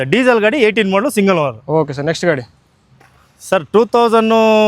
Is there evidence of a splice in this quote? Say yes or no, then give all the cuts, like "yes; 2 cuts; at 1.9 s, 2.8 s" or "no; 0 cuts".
no; 0 cuts